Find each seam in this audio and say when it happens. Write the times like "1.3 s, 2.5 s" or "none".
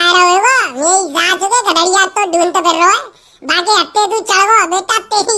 none